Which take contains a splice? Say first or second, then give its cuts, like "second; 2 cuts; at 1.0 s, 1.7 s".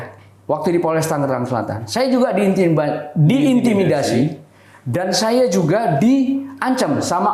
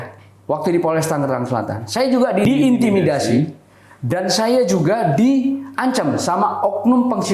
second; 1 cut; at 2.5 s